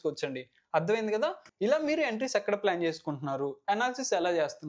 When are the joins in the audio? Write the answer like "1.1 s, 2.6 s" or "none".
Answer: 1.5 s